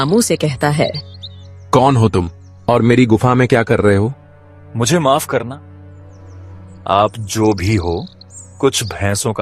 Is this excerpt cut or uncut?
uncut